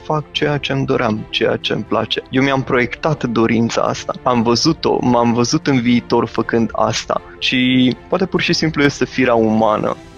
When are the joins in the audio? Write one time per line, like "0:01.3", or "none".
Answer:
0:02.2
0:04.1
0:07.3
0:08.0